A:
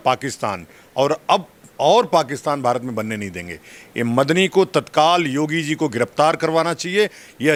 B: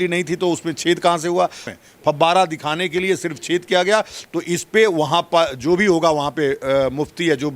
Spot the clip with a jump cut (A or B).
B